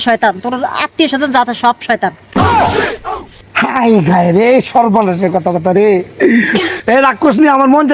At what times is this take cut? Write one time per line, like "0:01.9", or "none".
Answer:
0:06.6